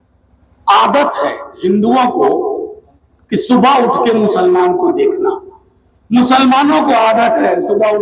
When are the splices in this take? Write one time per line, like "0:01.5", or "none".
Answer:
none